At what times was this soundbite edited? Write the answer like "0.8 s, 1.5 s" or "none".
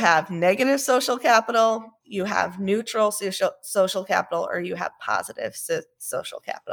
none